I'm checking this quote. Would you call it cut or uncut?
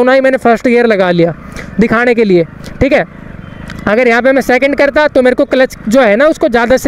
uncut